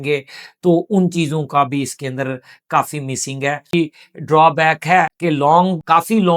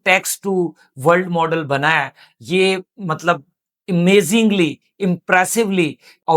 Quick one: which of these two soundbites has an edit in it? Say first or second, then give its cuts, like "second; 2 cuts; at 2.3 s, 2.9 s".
first; 2 cuts; at 3.7 s, 5.1 s